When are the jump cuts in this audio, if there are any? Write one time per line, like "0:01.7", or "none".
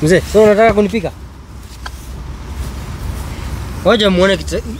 none